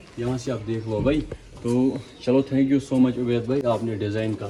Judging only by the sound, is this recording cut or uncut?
uncut